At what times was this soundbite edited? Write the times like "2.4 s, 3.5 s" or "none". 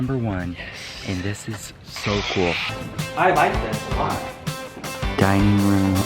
5.1 s